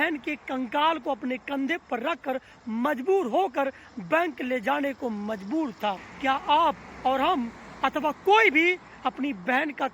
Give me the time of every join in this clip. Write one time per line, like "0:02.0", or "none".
0:06.1

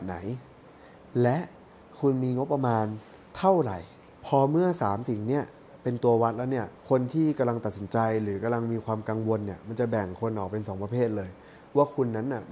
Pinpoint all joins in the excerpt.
0:04.1
0:06.7

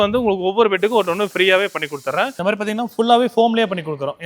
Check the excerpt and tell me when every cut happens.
0:02.4

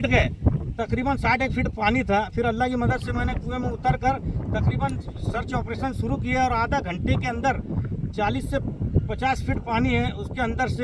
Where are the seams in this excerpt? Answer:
none

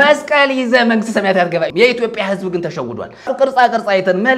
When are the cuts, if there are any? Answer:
0:01.7
0:03.3

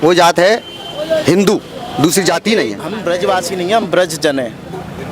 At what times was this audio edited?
0:02.9

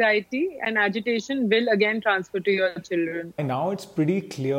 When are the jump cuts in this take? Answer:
0:03.4

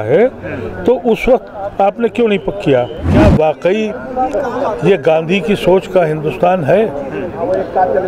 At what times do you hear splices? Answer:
0:03.1

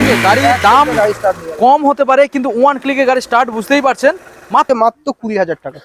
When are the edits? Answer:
0:04.7

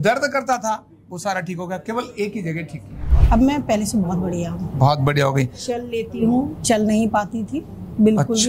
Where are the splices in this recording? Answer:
0:03.1

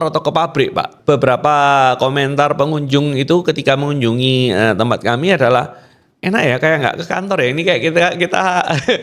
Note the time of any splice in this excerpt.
0:00.9

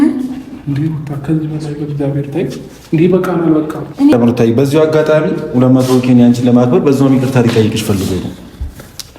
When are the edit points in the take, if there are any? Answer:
0:04.1

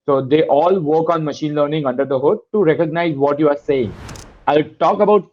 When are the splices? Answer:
0:04.4

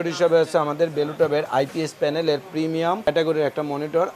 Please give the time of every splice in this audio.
0:03.1

